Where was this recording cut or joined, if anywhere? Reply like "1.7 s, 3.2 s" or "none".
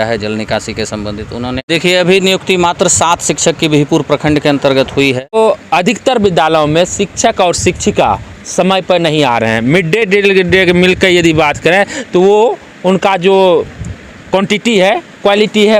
1.7 s, 5.3 s

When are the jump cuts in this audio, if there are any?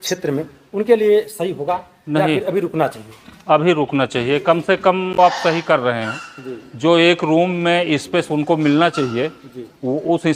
5.2 s

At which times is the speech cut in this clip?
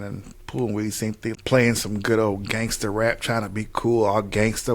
1.3 s

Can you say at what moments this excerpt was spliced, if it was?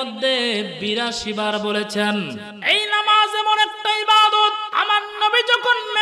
2.5 s, 4.6 s

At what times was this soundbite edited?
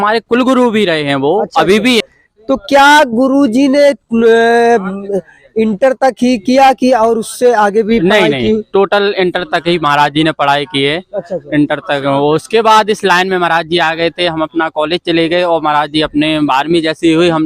2.0 s

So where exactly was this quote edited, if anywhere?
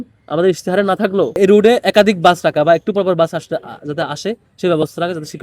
1.3 s

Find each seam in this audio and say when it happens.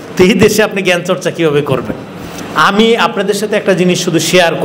none

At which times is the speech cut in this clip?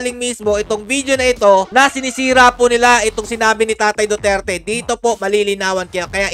none

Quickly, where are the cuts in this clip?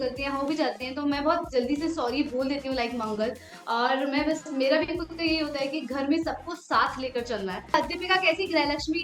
7.7 s

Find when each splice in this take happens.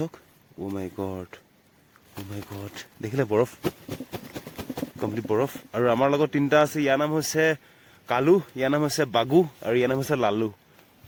none

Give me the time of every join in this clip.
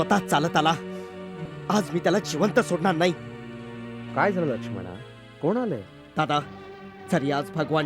1.3 s, 6.0 s

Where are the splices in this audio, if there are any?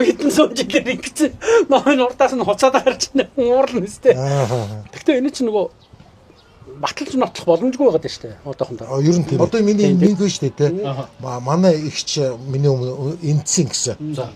9.3 s

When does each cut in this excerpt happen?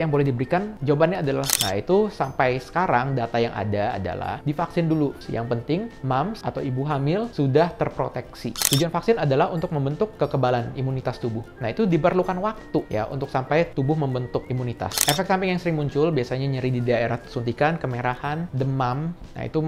1.6 s, 5.2 s, 8.6 s, 15.0 s

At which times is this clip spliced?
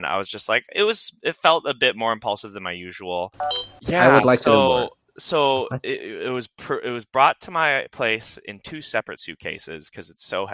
3.7 s

